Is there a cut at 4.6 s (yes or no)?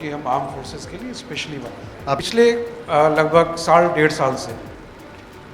no